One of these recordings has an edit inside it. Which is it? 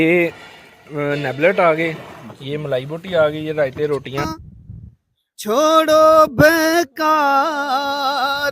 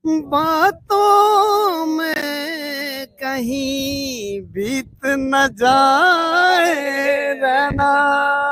first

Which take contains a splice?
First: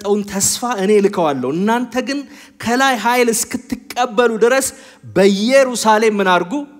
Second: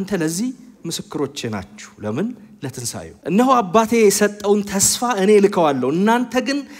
second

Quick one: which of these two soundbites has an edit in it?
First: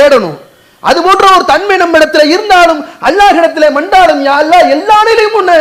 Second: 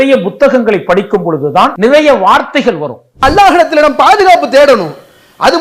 second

